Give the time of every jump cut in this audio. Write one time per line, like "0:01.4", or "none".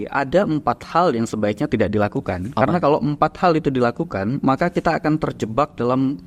none